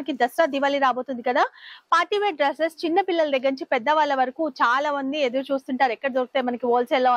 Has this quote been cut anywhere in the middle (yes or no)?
no